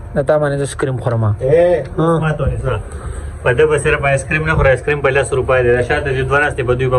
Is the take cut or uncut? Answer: uncut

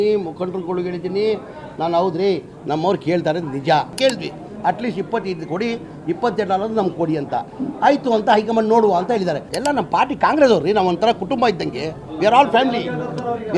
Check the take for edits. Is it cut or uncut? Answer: cut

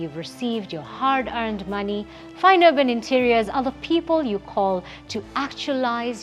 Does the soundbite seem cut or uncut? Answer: uncut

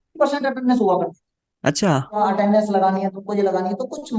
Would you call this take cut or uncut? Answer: cut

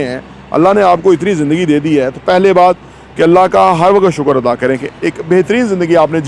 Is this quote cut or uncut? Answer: uncut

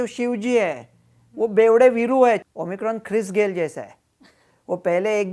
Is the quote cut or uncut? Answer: cut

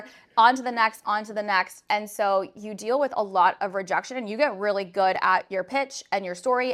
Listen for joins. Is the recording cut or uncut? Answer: uncut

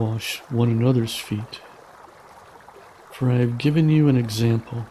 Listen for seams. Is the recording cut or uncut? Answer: cut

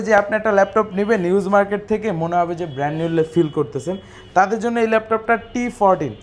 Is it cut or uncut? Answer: uncut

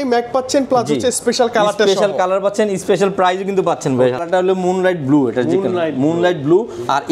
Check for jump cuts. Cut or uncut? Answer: cut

